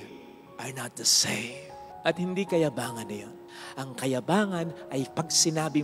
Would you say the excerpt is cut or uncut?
cut